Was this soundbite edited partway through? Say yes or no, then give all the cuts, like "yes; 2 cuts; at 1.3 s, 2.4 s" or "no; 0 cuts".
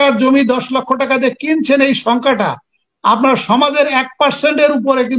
no; 0 cuts